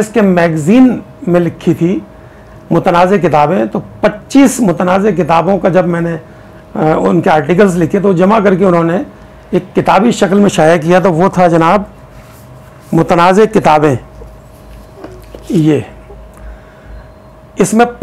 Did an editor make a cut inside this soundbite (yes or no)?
no